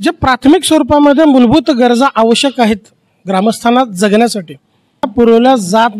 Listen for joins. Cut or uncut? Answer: cut